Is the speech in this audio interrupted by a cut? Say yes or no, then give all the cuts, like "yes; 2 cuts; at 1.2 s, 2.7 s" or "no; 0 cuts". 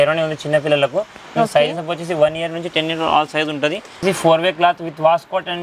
yes; 1 cut; at 4.0 s